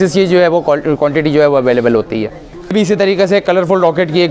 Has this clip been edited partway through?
yes; 1 cut; at 2.7 s

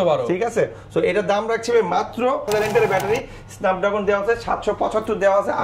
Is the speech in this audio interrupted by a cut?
yes; 1 cut; at 2.4 s

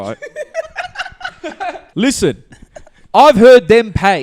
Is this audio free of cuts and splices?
no; 1 cut; at 1.8 s

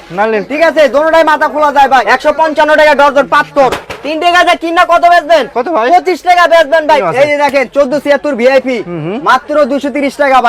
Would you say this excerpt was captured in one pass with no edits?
no; 3 cuts; at 2.0 s, 3.8 s, 7.0 s

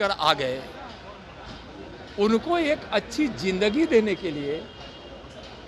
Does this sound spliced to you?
no; 0 cuts

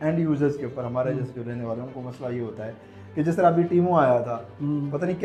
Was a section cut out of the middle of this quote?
no; 0 cuts

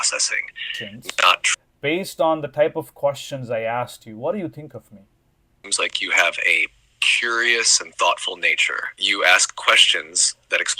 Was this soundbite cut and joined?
yes; 2 cuts; at 1.5 s, 5.6 s

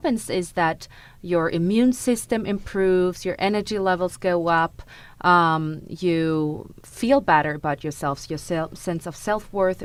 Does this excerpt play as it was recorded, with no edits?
yes; 0 cuts

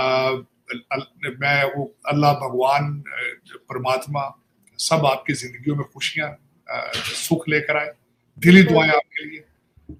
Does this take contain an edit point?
no; 0 cuts

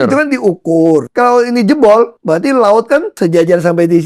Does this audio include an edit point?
yes; 3 cuts; at 1.1 s, 2.2 s, 3.1 s

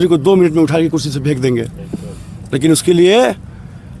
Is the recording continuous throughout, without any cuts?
yes; 0 cuts

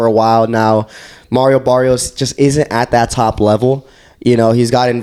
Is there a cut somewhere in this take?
no; 0 cuts

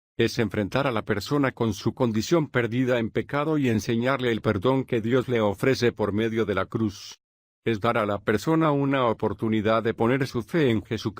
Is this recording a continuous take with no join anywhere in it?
no; 1 cut; at 3.0 s

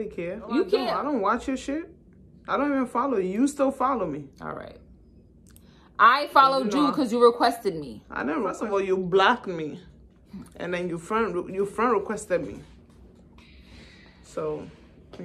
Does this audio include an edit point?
no; 0 cuts

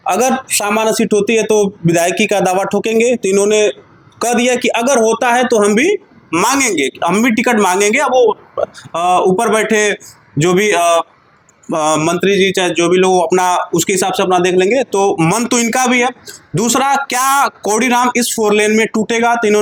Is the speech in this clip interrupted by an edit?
no; 0 cuts

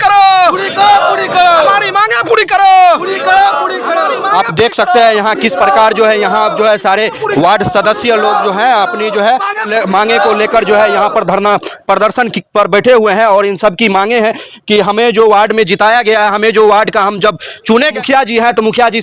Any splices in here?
yes; 2 cuts; at 9.7 s, 17.9 s

